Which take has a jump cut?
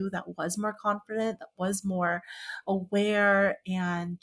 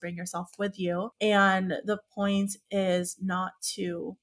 second; 1 cut; at 1.1 s

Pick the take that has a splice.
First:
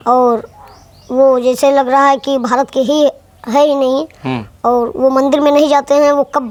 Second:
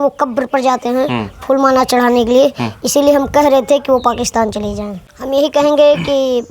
second; 1 cut; at 4.9 s

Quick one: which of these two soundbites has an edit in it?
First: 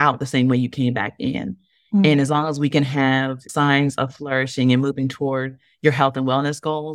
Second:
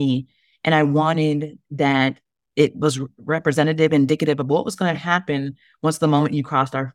first; 1 cut; at 3.5 s

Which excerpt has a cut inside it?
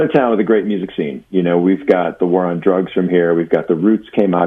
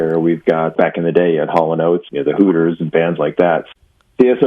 second; 3 cuts; at 0.7 s, 2.1 s, 3.6 s

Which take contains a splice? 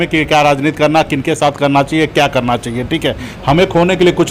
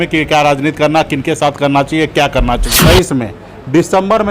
second; 1 cut; at 2.7 s

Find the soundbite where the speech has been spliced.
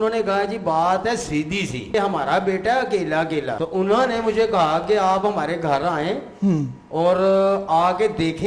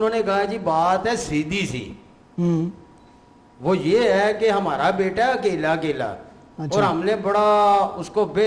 first; 2 cuts; at 1.9 s, 3.6 s

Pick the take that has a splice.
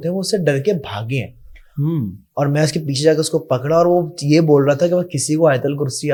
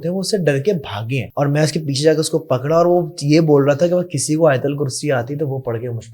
second; 1 cut; at 1.3 s

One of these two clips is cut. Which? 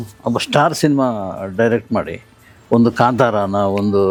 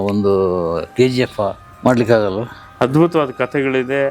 second; 2 cuts; at 1.6 s, 2.6 s

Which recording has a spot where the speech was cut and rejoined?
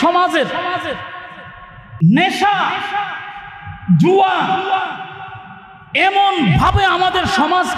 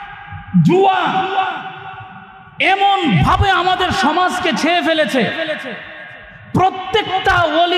first; 1 cut; at 1.8 s

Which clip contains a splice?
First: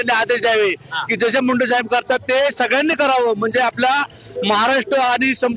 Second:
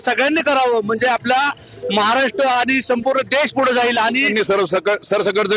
second; 1 cut; at 4.3 s

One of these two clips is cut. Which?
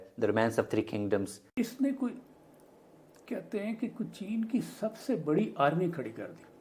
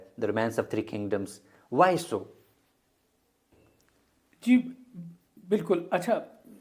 first; 1 cut; at 1.5 s

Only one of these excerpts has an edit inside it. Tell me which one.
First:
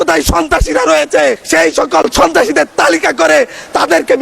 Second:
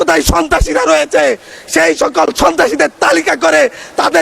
first; 1 cut; at 1.4 s

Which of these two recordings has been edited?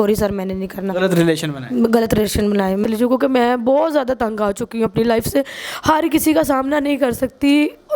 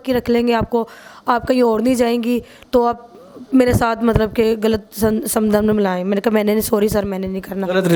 first; 1 cut; at 2.8 s

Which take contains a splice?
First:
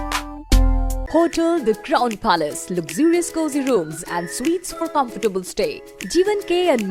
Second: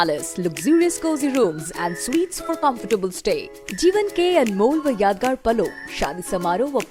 first; 1 cut; at 1.0 s

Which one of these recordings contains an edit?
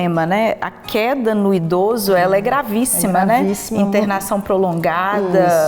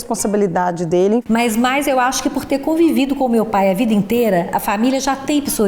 second; 1 cut; at 1.2 s

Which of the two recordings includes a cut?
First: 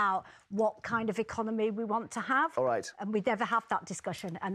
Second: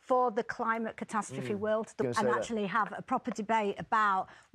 second; 1 cut; at 2.0 s

